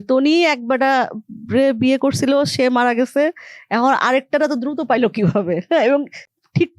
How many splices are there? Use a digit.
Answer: 0